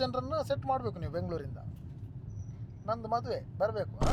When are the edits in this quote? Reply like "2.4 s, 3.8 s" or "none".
none